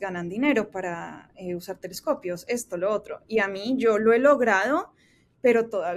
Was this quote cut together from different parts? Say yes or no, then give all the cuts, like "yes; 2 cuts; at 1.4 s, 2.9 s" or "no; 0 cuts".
no; 0 cuts